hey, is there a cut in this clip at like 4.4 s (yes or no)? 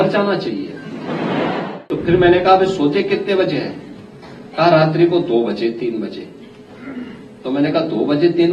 no